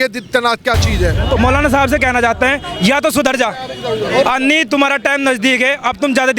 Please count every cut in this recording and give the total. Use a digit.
1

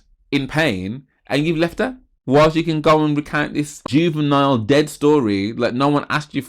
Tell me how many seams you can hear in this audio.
2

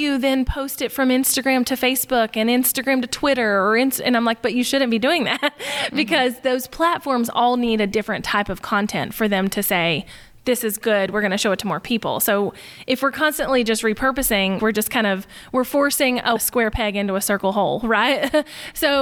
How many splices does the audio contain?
2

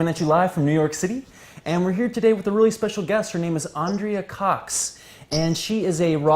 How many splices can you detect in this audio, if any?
1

